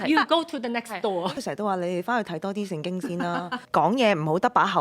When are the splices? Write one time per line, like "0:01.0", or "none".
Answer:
0:01.4